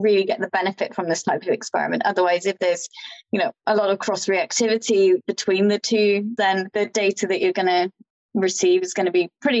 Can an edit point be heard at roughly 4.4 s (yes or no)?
no